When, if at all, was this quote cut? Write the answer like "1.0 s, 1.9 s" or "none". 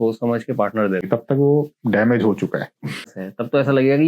1.1 s, 3.0 s